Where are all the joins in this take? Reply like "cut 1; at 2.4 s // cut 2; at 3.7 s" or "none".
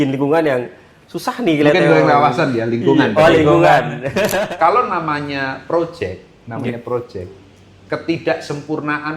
cut 1; at 4.2 s